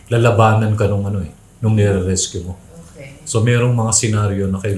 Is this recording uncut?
yes; 0 cuts

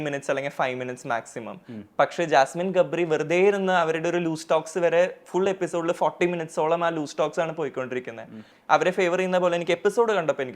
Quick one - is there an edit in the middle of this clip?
yes; 1 cut; at 8.5 s

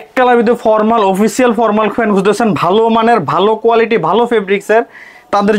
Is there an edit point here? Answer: no; 0 cuts

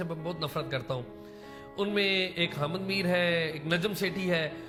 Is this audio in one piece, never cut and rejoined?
yes; 0 cuts

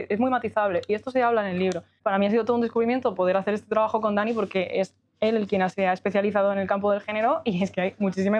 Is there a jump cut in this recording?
yes; 1 cut; at 1.9 s

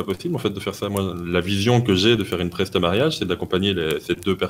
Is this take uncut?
yes; 0 cuts

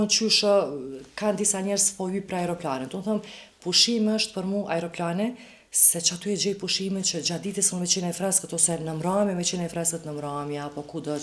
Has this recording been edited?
no; 0 cuts

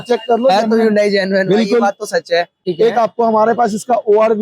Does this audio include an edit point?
yes; 1 cut; at 2.6 s

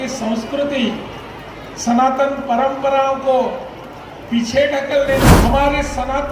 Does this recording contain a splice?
yes; 1 cut; at 5.3 s

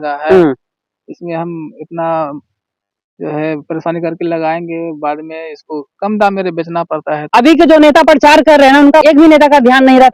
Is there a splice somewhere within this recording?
yes; 2 cuts; at 7.2 s, 9.0 s

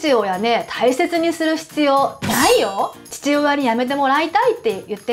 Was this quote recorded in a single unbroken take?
no; 1 cut; at 3.0 s

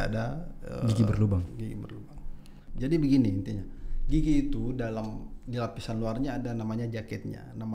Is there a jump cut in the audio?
yes; 1 cut; at 2.6 s

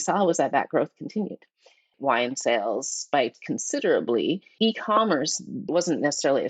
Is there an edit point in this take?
yes; 1 cut; at 2.0 s

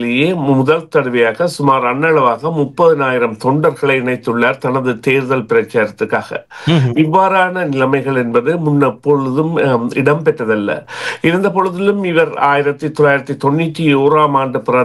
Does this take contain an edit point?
no; 0 cuts

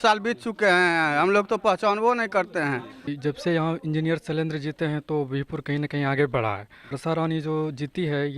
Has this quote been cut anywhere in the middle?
yes; 2 cuts; at 3.1 s, 6.9 s

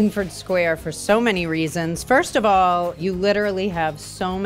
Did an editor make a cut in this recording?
no; 0 cuts

